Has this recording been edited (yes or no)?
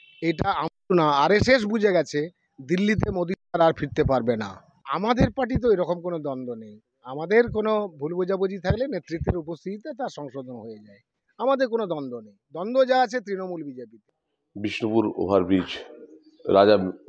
yes